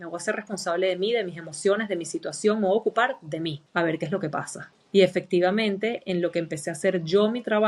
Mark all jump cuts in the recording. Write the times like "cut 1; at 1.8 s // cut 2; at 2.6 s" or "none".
none